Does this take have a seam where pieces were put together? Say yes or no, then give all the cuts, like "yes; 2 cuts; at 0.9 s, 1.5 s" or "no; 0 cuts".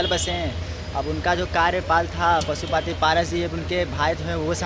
no; 0 cuts